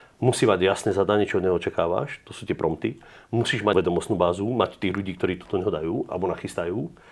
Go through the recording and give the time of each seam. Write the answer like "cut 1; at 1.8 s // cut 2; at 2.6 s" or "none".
cut 1; at 3.7 s